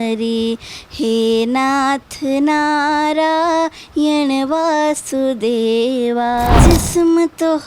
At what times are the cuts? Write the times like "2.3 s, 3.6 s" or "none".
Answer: 6.6 s